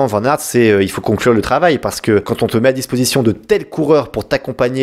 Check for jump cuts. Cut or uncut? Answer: uncut